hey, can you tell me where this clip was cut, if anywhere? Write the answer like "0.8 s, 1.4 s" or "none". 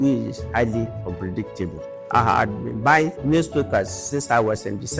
1.0 s, 1.9 s